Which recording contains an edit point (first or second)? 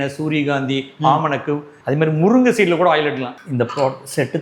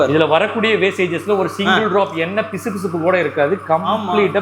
first